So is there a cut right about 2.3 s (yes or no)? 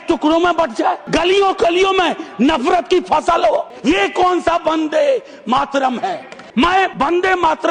no